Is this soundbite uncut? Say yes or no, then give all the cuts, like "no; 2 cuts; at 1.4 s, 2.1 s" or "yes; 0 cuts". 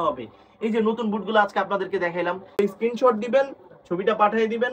no; 1 cut; at 2.6 s